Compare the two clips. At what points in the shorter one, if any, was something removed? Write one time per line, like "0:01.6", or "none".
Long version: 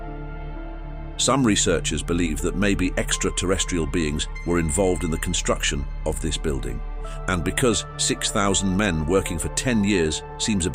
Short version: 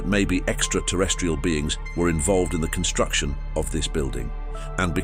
none